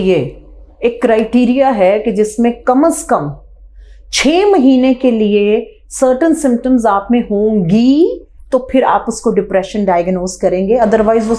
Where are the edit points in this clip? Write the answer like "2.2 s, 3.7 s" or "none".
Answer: none